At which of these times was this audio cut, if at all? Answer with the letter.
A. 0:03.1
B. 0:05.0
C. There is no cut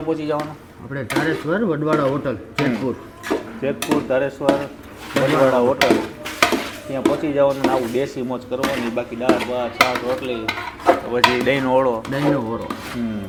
C